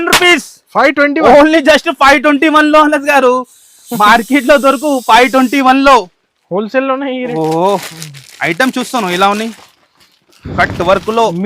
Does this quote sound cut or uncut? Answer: cut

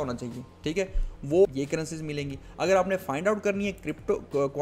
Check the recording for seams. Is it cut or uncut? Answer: cut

